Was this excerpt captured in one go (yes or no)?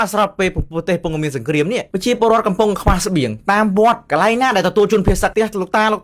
no